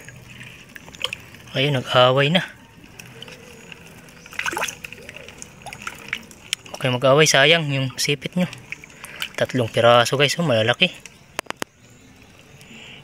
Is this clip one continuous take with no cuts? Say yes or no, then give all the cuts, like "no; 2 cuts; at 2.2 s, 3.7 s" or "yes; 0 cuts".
yes; 0 cuts